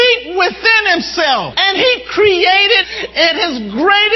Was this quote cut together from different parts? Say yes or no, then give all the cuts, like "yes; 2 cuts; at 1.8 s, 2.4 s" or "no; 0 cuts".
yes; 2 cuts; at 1.5 s, 2.9 s